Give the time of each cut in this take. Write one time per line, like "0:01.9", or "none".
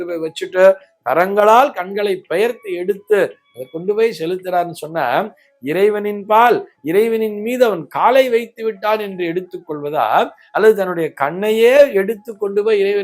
none